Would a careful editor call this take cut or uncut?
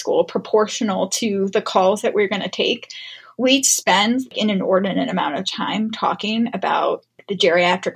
uncut